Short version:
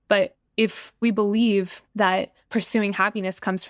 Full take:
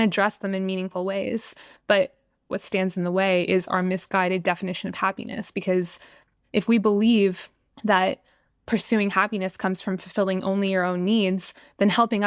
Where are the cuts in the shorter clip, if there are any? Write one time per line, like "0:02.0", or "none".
0:00.9
0:02.1